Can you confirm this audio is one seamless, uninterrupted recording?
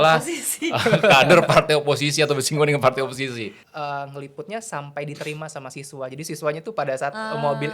no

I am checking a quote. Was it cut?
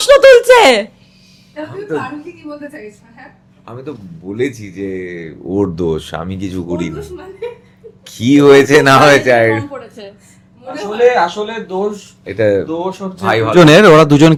no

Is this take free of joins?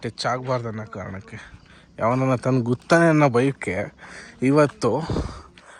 yes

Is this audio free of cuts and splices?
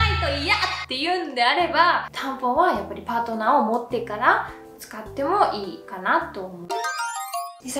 yes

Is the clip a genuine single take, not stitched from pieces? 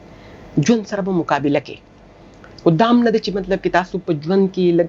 yes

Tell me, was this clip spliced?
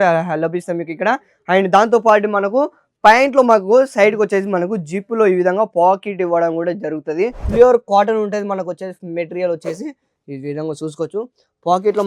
yes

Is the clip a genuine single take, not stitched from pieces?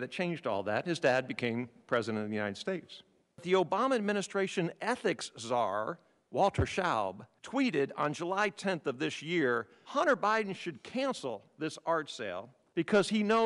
no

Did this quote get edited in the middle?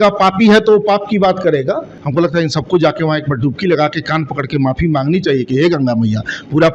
yes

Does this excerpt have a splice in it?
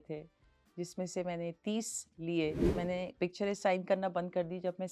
yes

